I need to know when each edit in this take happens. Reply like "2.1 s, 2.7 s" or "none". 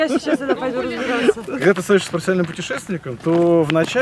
1.5 s